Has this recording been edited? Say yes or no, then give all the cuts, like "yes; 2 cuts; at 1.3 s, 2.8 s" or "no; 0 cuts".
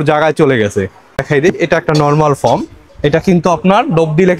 yes; 1 cut; at 1.2 s